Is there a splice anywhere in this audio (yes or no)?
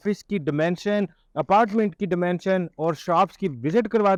no